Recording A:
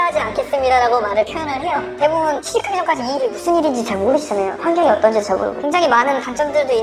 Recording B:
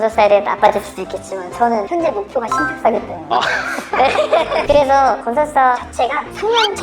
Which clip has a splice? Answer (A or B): B